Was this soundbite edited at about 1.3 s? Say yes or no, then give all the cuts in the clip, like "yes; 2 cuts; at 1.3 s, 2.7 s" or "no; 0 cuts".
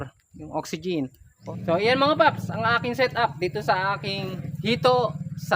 yes; 2 cuts; at 1.3 s, 4.4 s